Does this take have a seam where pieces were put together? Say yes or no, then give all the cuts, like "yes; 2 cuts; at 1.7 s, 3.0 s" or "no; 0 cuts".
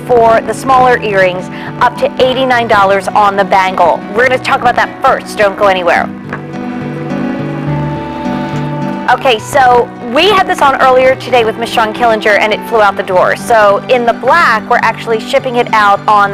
no; 0 cuts